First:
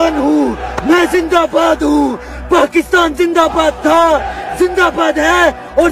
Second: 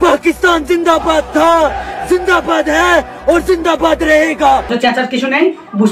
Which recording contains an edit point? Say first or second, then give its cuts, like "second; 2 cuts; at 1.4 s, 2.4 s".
second; 1 cut; at 4.7 s